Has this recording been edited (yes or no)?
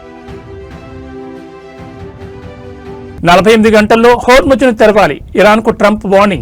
no